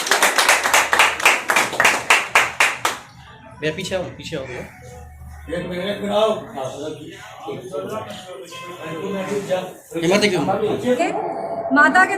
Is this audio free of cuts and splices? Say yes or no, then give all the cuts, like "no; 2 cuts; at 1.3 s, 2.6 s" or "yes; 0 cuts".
no; 1 cut; at 11.0 s